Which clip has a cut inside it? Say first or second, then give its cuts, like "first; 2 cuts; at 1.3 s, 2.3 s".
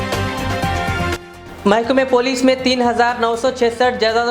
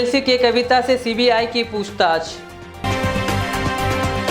first; 1 cut; at 1.1 s